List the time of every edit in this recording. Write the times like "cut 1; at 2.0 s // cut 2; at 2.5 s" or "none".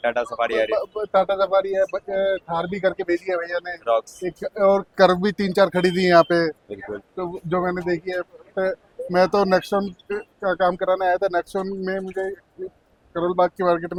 none